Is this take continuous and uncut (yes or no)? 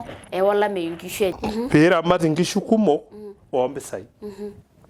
no